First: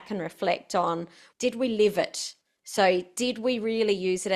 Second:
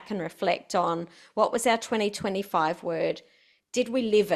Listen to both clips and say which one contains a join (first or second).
first